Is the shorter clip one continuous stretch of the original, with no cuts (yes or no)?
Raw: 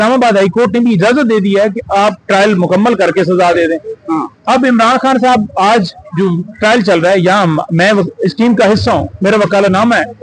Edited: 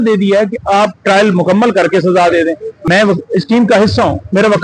no